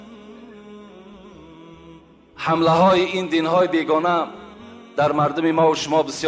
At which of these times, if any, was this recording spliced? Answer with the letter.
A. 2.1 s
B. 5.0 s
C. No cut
A